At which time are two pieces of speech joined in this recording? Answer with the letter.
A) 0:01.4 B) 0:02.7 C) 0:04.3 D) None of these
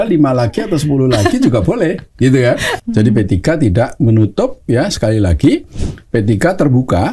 B